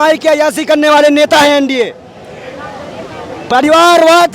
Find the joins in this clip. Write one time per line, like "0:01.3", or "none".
none